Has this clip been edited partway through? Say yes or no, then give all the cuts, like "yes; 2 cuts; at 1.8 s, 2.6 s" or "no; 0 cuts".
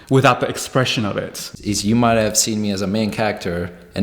yes; 1 cut; at 1.5 s